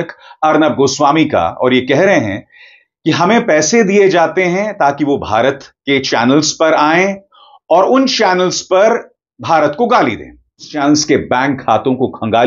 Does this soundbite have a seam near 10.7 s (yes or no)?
yes